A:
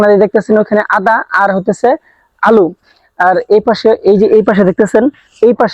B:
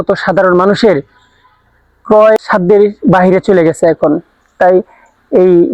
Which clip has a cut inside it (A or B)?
B